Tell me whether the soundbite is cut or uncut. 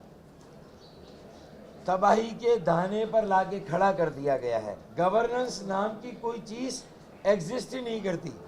cut